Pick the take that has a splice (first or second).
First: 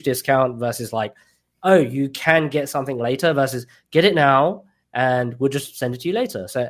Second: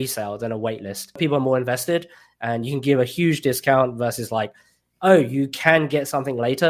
second